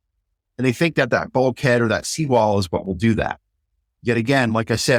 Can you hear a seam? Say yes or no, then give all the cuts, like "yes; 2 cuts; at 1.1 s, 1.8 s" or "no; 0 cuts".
no; 0 cuts